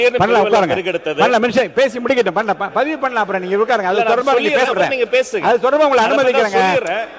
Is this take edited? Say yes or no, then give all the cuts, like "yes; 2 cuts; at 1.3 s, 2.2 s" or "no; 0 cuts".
no; 0 cuts